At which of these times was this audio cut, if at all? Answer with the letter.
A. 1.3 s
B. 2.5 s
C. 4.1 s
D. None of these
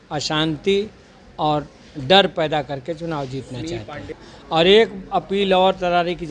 C